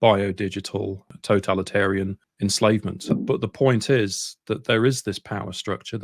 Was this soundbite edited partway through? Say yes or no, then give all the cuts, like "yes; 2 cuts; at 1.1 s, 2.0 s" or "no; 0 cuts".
yes; 3 cuts; at 1.1 s, 2.2 s, 3.2 s